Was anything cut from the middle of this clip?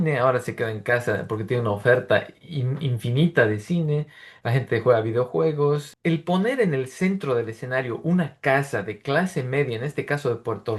yes; 1 cut; at 5.9 s

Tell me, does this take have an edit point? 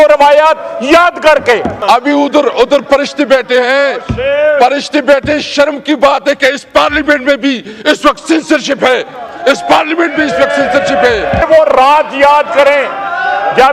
yes; 2 cuts; at 1.8 s, 11.4 s

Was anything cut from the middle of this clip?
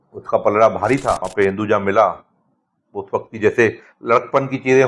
yes; 1 cut; at 1.3 s

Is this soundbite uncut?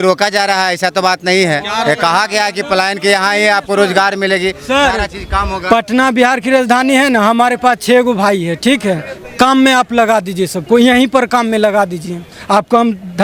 yes; 0 cuts

